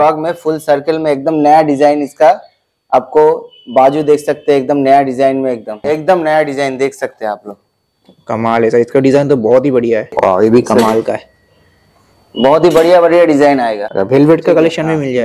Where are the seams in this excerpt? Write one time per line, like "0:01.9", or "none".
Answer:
0:05.8
0:10.1
0:13.8